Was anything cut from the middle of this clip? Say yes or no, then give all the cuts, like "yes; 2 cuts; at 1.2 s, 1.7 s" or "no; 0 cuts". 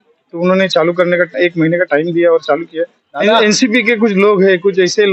yes; 1 cut; at 3.1 s